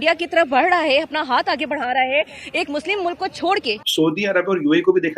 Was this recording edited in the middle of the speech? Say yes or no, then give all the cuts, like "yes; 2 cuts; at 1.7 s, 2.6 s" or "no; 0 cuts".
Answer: yes; 1 cut; at 3.8 s